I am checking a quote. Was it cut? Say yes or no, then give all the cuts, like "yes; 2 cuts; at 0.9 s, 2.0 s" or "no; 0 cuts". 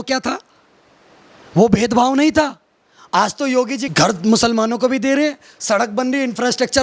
yes; 1 cut; at 3.9 s